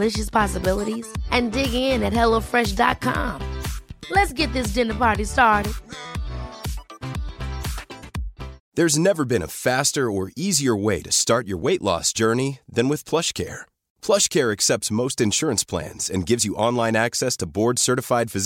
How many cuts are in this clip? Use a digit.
1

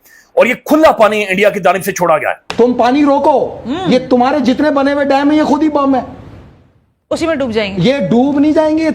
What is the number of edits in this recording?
1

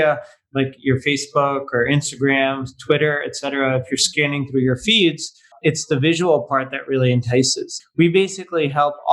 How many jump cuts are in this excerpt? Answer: 2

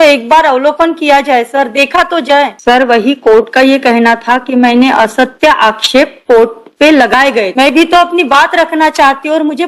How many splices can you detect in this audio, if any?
2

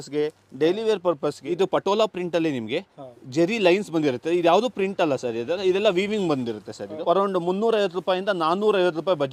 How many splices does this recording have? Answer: 2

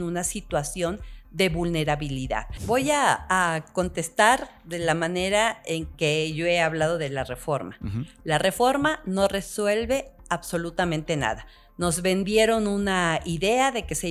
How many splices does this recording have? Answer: 1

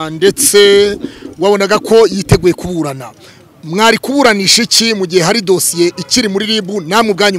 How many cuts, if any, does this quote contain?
0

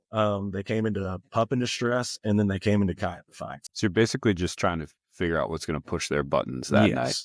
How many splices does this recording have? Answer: 1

